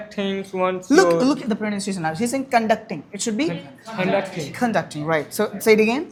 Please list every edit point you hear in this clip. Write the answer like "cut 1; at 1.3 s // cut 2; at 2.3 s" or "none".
none